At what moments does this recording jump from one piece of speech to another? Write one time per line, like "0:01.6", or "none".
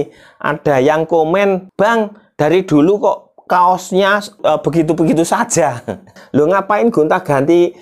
0:01.7
0:04.4
0:06.0